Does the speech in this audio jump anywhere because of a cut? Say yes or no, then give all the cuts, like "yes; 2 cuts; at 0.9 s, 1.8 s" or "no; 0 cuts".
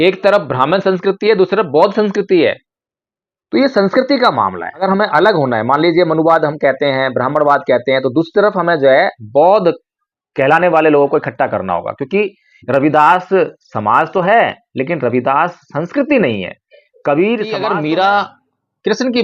yes; 2 cuts; at 4.8 s, 17.5 s